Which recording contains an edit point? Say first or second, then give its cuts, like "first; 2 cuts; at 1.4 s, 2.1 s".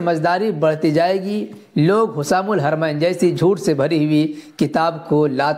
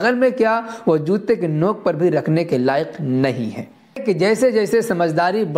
second; 1 cut; at 4.0 s